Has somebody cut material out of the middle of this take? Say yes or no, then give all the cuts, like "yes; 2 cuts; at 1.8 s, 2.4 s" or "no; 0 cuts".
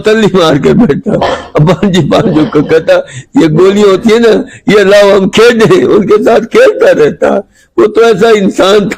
no; 0 cuts